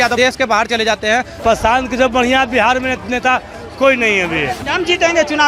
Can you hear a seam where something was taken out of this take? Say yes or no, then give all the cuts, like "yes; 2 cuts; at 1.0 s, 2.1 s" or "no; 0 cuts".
yes; 2 cuts; at 1.4 s, 4.7 s